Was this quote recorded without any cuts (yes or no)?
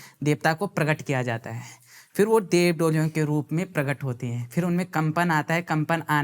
yes